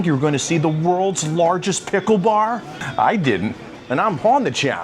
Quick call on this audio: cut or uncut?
cut